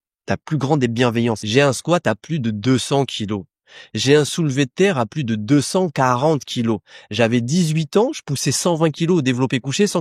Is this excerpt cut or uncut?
cut